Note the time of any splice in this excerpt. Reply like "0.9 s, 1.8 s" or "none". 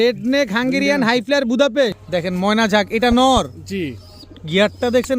2.0 s

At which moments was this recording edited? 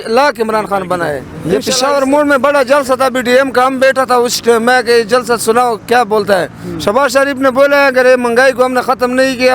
1.3 s

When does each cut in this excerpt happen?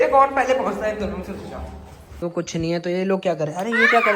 2.2 s

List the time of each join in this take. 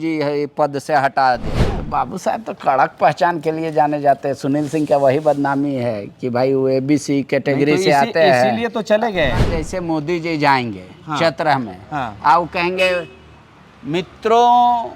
1.5 s, 9.5 s

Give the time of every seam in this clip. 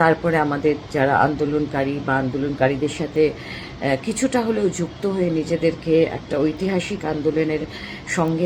none

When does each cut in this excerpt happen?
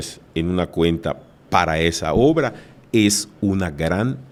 none

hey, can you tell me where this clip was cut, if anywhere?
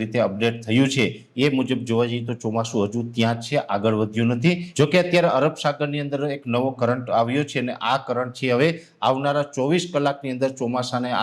4.7 s

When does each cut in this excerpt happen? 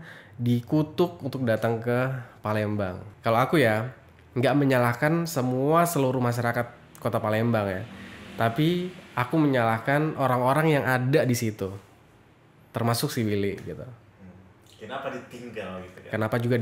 3.0 s

